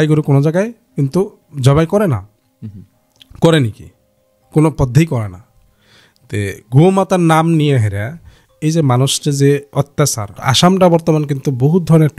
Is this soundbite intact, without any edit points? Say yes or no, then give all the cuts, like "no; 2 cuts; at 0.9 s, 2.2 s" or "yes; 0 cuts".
no; 1 cut; at 10.4 s